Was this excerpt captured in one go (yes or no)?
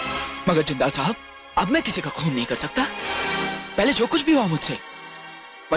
yes